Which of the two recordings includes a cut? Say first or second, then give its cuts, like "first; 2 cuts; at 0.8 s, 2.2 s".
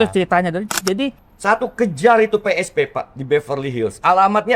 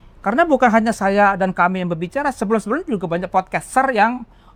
first; 1 cut; at 1.2 s